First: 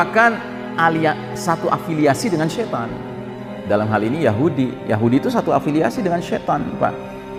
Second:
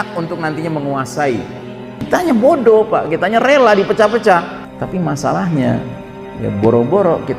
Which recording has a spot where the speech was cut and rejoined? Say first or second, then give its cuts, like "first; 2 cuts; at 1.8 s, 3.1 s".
second; 2 cuts; at 2.0 s, 4.6 s